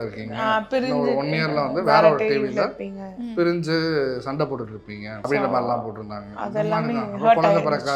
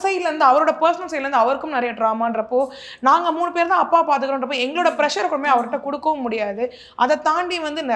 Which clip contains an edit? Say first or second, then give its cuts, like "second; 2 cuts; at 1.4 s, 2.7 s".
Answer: first; 1 cut; at 5.2 s